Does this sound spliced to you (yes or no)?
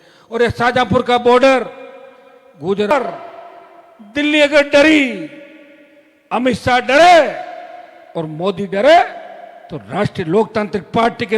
yes